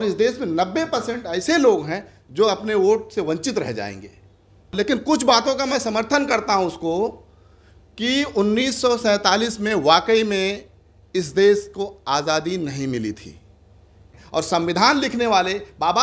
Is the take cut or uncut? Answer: cut